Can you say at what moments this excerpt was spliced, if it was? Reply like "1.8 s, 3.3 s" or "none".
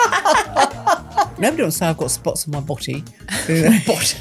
1.4 s

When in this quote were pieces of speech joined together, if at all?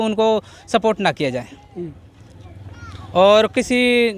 none

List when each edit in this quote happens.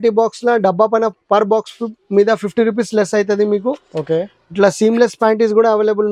none

